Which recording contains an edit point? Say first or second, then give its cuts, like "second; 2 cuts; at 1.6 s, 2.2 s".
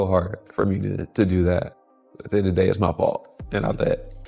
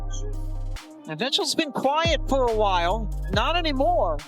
second; 1 cut; at 1.0 s